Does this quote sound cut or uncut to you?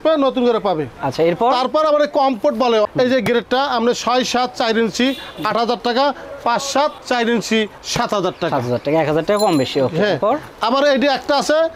uncut